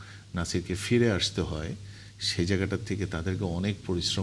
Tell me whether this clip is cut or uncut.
uncut